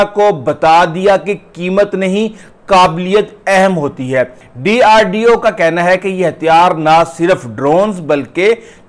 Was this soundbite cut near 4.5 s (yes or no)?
yes